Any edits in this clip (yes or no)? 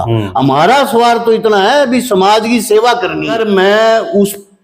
yes